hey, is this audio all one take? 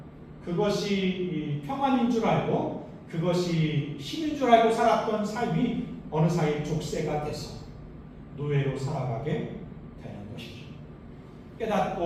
yes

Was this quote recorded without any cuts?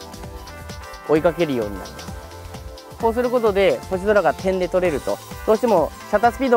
yes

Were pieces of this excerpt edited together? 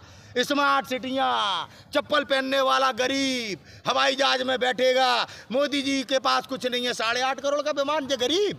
no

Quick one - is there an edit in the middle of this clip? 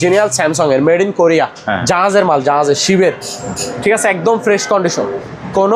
no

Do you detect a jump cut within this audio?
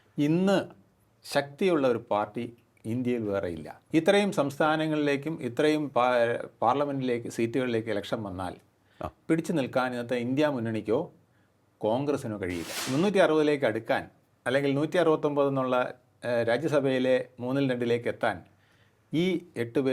yes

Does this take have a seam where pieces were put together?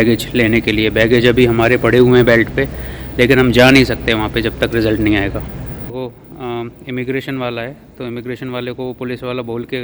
yes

